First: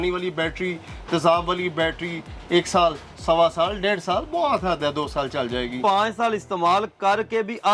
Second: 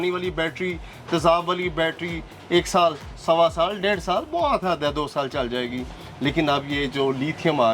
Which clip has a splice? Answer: first; 1 cut; at 5.8 s

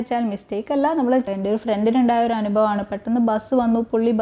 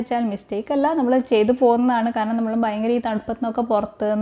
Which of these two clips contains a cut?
first; 1 cut; at 1.2 s

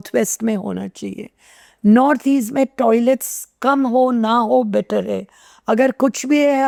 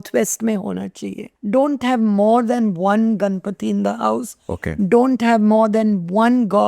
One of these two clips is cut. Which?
second; 1 cut; at 1.3 s

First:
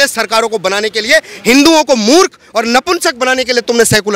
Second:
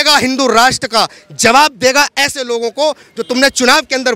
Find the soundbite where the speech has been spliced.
second; 1 cut; at 3.1 s

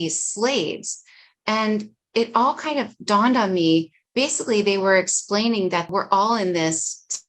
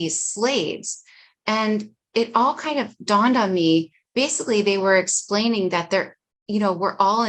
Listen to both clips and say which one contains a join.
first; 1 cut; at 5.9 s

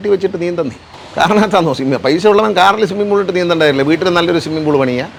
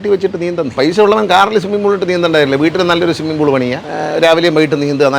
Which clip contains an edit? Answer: second; 2 cuts; at 0.7 s, 3.9 s

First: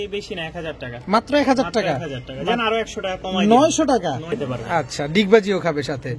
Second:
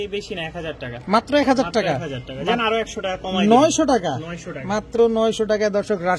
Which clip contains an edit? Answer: first; 1 cut; at 4.4 s

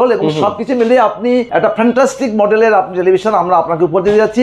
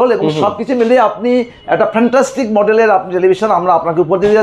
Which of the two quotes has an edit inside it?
first; 1 cut; at 1.5 s

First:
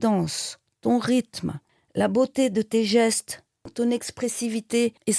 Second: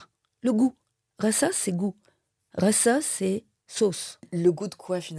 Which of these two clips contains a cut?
first; 1 cut; at 3.7 s

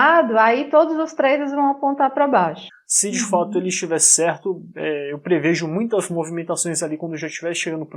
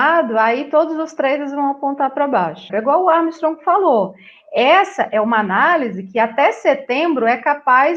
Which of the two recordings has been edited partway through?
first; 1 cut; at 2.6 s

